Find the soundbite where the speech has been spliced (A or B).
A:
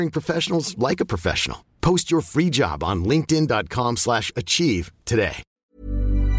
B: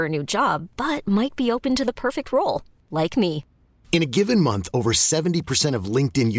A